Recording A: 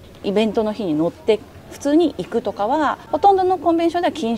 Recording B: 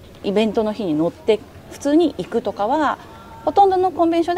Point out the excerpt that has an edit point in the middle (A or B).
A